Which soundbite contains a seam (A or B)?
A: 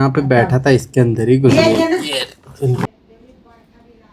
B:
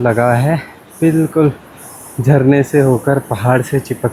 A